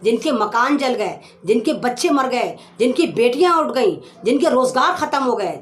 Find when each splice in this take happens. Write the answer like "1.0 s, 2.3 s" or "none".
none